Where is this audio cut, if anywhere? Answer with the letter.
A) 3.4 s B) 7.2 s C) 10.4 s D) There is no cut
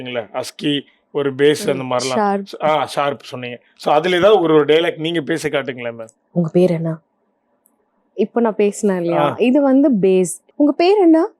C